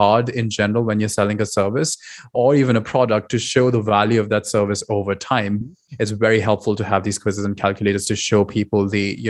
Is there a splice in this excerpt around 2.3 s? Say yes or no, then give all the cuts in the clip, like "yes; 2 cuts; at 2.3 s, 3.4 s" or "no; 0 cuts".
yes; 2 cuts; at 2.3 s, 5.6 s